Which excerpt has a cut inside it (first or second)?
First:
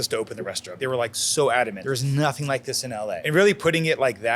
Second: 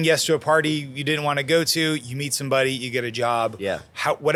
first